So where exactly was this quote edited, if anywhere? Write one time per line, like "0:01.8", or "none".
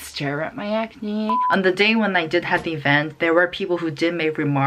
0:01.4